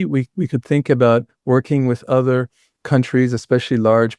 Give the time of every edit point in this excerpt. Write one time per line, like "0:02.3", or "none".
none